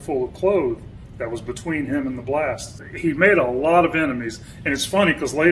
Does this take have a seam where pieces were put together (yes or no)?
yes